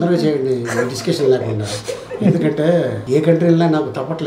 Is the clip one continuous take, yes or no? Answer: no